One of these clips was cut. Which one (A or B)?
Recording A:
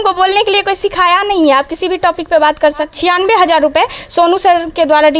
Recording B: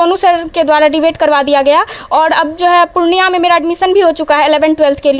A